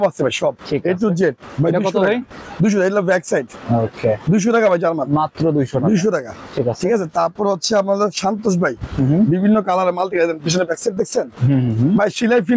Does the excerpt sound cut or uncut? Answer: uncut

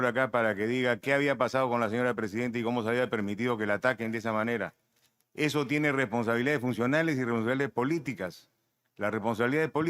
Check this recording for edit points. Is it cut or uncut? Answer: uncut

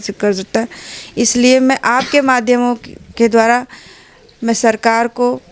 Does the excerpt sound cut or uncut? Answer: uncut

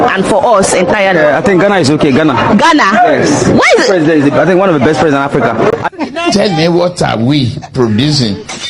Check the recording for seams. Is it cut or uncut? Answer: cut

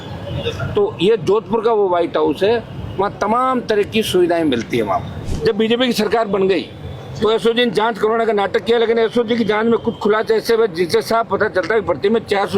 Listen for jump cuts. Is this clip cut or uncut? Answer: cut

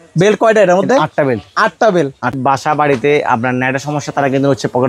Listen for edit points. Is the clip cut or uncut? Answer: cut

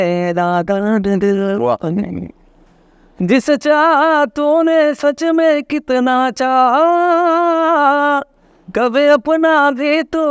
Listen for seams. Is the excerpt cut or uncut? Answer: uncut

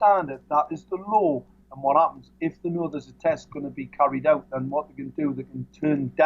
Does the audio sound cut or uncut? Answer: cut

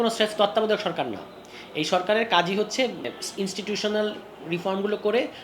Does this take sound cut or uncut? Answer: cut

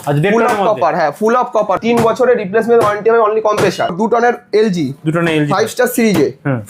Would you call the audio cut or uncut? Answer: cut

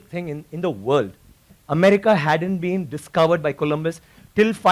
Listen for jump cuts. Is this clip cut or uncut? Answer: cut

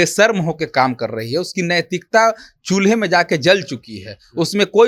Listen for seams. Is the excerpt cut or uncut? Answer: uncut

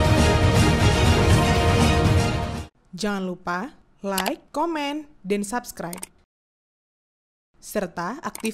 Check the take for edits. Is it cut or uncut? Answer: cut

